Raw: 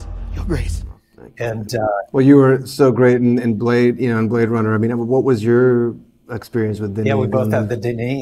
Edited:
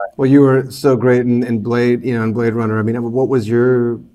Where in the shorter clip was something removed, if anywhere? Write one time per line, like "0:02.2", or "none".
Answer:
none

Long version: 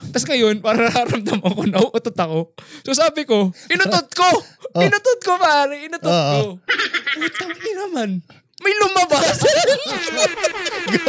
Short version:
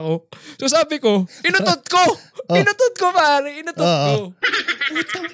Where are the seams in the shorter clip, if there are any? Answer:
none

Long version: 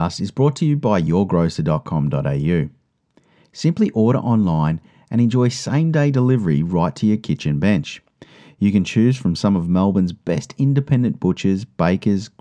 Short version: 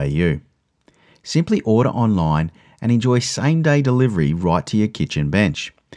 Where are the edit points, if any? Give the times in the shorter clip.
none

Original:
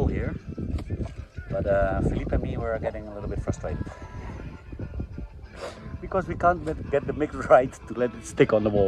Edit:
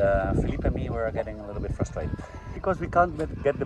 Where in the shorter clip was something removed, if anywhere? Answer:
0:02.5

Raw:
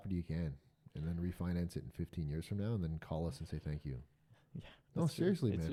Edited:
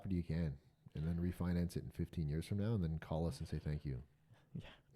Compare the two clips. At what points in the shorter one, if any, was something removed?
none

